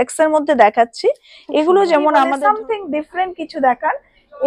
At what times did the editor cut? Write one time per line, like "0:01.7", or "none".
0:02.3